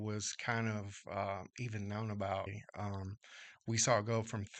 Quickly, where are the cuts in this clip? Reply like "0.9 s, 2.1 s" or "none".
2.5 s